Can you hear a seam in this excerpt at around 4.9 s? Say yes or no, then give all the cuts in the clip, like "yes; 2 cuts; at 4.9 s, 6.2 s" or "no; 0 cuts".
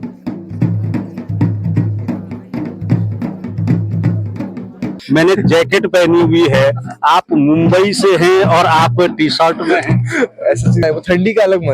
yes; 2 cuts; at 4.9 s, 10.8 s